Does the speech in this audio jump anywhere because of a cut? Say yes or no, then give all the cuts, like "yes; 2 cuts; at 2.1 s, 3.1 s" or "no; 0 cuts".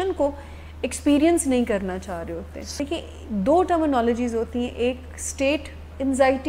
yes; 1 cut; at 2.6 s